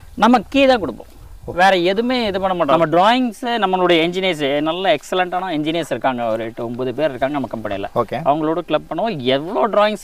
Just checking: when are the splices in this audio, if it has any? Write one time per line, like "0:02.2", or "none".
0:02.7